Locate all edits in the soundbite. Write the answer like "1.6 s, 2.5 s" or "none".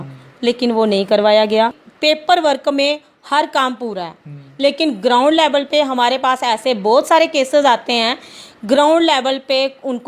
1.9 s